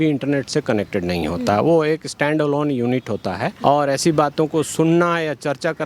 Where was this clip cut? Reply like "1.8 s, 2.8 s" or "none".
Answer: 3.5 s